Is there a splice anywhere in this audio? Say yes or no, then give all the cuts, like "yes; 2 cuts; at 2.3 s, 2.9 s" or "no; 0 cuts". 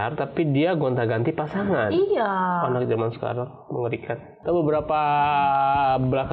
yes; 1 cut; at 4.3 s